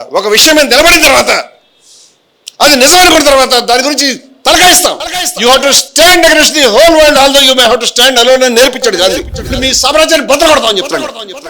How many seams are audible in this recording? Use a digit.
1